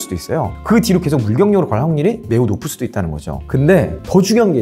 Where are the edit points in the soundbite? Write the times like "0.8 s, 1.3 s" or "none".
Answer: 3.4 s